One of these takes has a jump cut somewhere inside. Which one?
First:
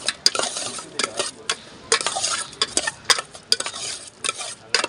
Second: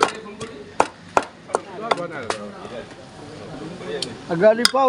second; 1 cut; at 2.2 s

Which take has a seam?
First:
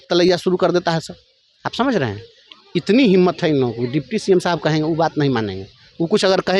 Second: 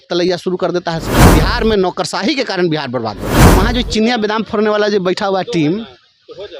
second; 2 cuts; at 1.1 s, 3.3 s

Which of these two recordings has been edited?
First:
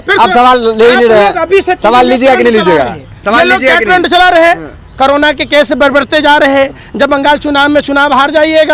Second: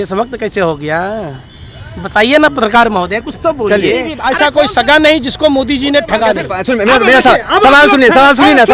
second; 2 cuts; at 4.1 s, 6.5 s

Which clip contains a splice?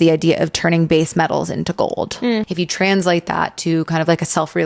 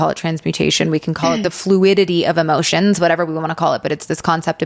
first; 1 cut; at 2.5 s

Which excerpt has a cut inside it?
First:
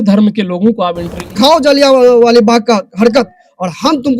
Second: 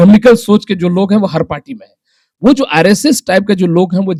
first; 1 cut; at 1.4 s

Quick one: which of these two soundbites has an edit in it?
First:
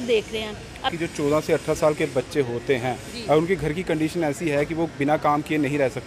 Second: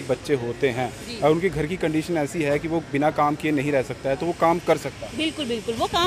first; 1 cut; at 0.9 s

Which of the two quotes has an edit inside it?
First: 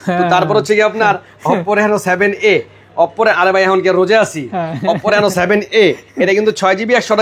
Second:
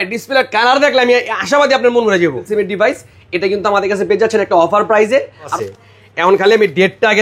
second; 2 cuts; at 2.5 s, 5.5 s

